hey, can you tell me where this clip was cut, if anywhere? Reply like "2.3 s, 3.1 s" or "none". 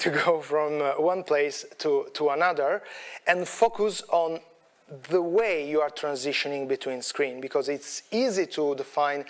none